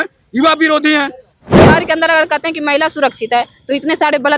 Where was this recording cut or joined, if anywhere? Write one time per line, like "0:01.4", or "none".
0:01.6